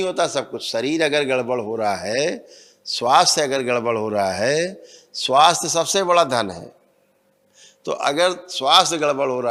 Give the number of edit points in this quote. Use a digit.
0